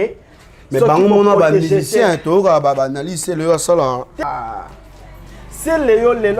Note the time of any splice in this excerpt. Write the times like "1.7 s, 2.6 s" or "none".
4.2 s

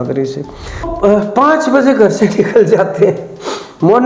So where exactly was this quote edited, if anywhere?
0.9 s

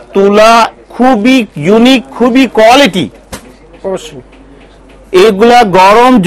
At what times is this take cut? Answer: none

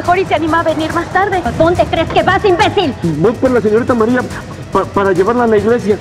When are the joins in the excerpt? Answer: 1.5 s, 3.0 s

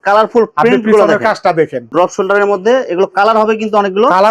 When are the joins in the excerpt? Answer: 1.9 s

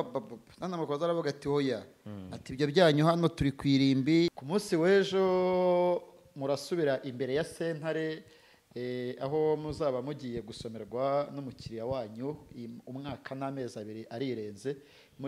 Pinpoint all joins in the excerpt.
4.4 s

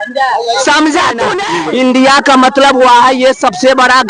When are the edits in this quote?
1.4 s

